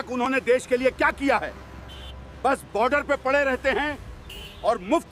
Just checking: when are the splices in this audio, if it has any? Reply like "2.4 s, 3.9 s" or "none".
none